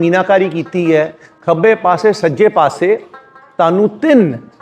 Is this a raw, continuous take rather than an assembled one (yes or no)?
no